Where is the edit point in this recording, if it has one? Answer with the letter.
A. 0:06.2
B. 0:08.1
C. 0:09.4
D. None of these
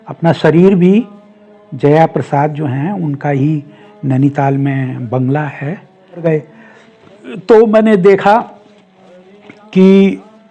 A